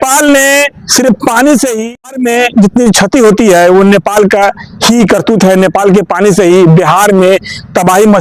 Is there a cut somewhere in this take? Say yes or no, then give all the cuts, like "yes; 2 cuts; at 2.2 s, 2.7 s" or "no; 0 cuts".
yes; 1 cut; at 1.8 s